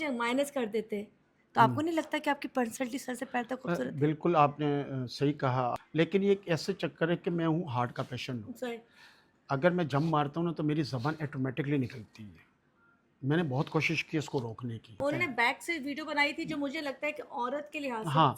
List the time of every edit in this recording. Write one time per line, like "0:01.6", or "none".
0:05.8
0:15.0

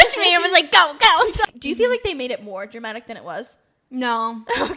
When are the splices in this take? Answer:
0:01.5

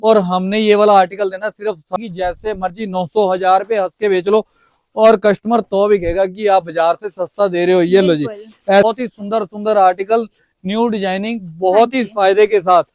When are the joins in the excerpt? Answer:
0:01.9
0:08.8

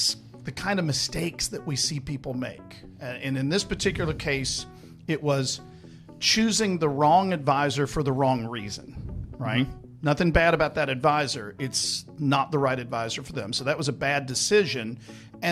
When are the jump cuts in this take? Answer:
none

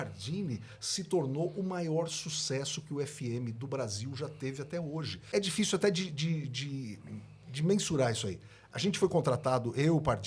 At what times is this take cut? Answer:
0:05.2

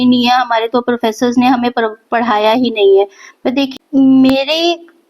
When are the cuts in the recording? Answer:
0:03.8

